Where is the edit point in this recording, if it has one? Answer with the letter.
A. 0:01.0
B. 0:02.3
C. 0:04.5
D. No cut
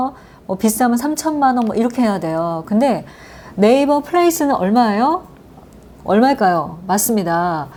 D